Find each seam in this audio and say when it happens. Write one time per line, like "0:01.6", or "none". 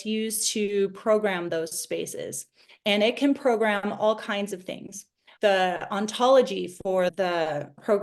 0:05.3